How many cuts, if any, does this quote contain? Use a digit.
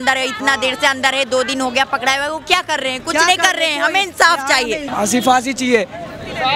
1